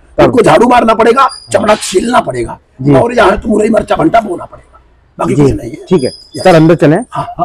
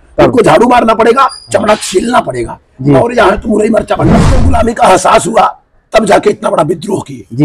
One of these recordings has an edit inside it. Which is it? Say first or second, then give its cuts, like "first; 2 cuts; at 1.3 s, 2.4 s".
second; 1 cut; at 4.3 s